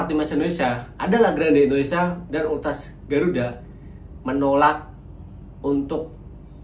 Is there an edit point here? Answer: no; 0 cuts

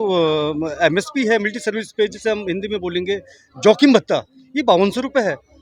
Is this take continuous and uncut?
yes; 0 cuts

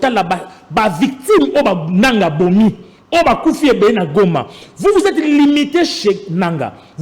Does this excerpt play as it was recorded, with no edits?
yes; 0 cuts

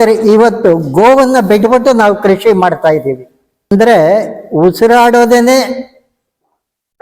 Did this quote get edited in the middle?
yes; 1 cut; at 3.7 s

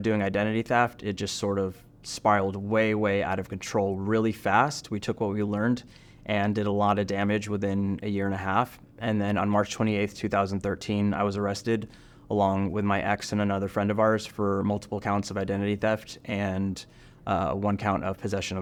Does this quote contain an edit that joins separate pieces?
no; 0 cuts

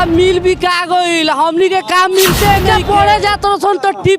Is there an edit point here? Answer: yes; 1 cut; at 2.7 s

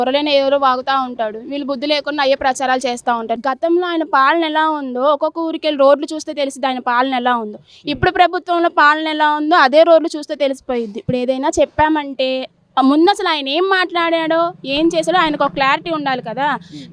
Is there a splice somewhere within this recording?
yes; 2 cuts; at 3.3 s, 11.0 s

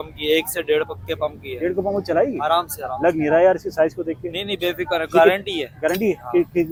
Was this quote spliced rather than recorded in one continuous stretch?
no; 0 cuts

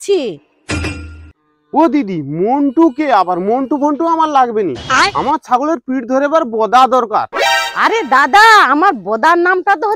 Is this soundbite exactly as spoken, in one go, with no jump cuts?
yes; 0 cuts

